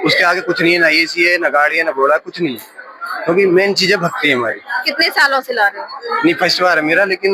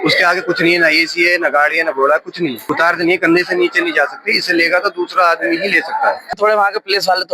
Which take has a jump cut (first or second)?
second